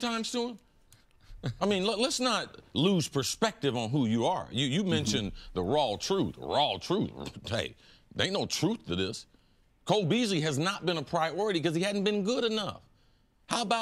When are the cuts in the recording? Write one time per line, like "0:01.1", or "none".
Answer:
none